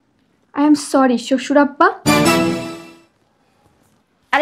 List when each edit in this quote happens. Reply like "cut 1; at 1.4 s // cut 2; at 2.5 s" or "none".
none